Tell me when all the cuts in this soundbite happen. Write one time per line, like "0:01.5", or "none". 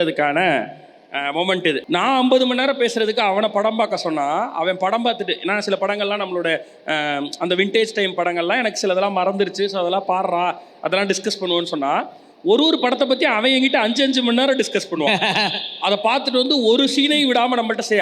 0:01.8